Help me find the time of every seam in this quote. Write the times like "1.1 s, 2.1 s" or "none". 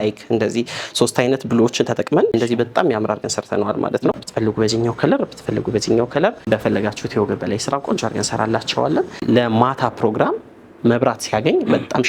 2.3 s, 4.1 s, 6.5 s, 9.2 s